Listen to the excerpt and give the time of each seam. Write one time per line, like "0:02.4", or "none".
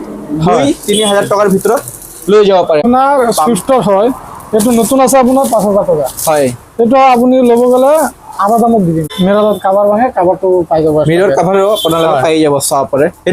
0:02.8
0:09.0